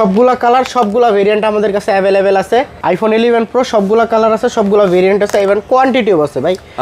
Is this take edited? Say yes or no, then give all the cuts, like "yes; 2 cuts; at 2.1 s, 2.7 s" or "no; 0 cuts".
yes; 1 cut; at 2.8 s